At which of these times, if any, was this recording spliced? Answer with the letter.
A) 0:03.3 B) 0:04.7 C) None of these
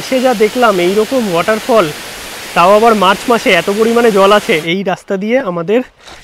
B